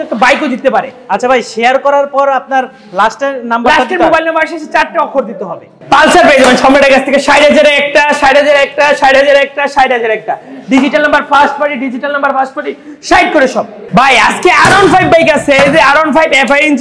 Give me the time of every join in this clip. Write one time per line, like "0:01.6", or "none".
0:05.7
0:13.8